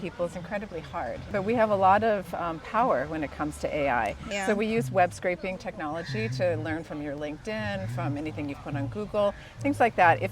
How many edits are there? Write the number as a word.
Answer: two